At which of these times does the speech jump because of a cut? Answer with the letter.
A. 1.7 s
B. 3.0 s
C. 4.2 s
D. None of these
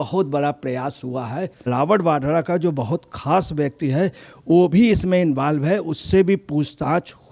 A